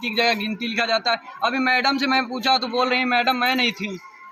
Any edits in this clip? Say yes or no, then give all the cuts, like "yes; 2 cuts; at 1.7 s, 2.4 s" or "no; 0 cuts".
no; 0 cuts